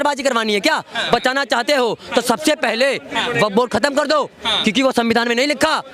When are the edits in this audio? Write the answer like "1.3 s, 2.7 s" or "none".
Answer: 1.0 s